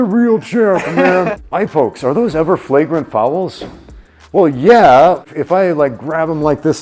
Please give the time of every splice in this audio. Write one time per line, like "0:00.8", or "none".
0:01.4
0:05.2